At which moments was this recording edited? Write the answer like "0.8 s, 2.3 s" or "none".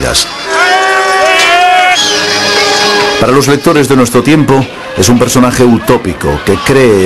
2.2 s